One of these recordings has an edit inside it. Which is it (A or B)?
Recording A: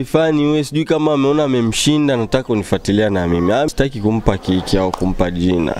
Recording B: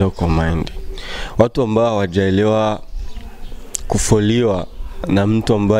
A